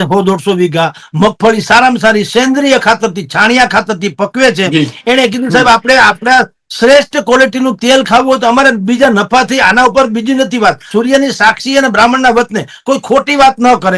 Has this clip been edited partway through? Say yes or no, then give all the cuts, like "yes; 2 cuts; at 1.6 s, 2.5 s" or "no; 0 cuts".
yes; 1 cut; at 10.8 s